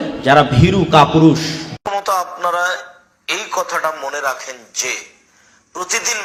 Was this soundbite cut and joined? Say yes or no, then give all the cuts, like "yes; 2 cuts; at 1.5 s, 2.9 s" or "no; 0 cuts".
no; 0 cuts